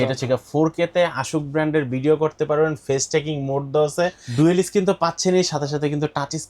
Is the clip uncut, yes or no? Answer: no